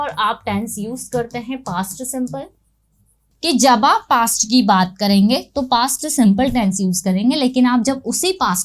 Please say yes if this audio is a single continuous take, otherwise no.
no